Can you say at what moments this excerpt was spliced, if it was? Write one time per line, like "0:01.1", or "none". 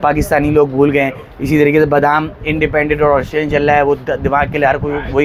none